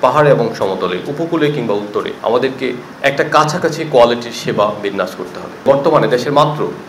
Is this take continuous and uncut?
no; 2 cuts; at 2.1 s, 5.6 s

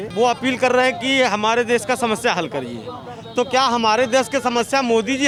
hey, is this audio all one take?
yes; 0 cuts

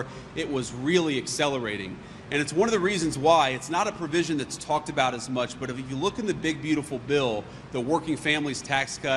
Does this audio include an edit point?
no; 0 cuts

